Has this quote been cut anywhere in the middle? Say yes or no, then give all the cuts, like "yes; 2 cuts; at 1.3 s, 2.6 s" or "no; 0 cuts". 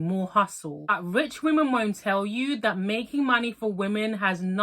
yes; 1 cut; at 1.0 s